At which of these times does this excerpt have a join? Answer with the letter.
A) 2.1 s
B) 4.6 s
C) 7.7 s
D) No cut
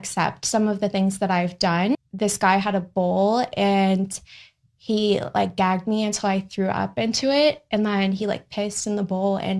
A